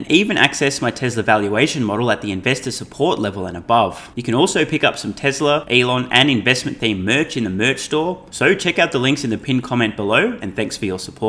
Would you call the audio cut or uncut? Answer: cut